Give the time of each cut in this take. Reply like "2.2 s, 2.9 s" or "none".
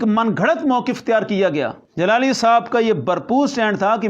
1.8 s